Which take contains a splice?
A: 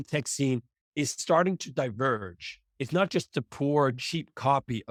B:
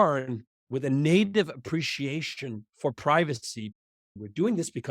B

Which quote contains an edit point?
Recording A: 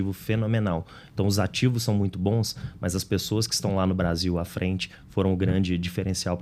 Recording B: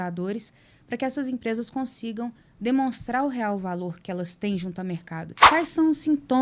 B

